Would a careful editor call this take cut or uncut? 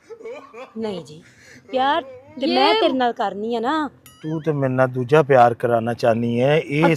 uncut